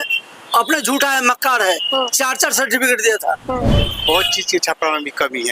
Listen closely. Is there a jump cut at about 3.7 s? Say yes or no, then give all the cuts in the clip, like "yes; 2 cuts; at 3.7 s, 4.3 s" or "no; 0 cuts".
yes; 1 cut; at 3.7 s